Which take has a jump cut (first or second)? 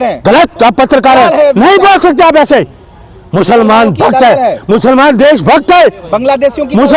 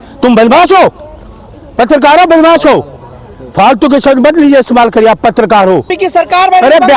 second